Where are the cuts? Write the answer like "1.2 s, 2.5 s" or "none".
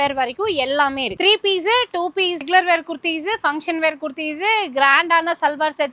1.2 s, 2.5 s